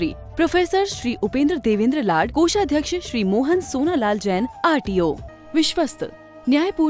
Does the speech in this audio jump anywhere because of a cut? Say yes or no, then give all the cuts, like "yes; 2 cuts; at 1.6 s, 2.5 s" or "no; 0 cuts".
yes; 1 cut; at 5.3 s